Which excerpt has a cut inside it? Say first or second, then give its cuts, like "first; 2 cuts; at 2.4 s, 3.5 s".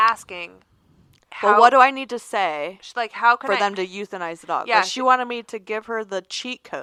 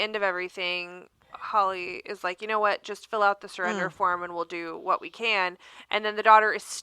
second; 1 cut; at 1.2 s